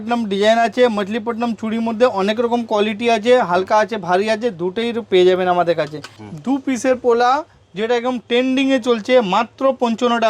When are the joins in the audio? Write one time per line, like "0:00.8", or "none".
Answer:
0:06.0